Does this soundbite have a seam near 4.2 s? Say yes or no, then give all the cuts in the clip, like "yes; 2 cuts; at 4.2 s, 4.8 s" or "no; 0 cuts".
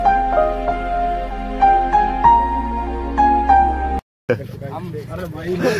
yes; 1 cut; at 4.2 s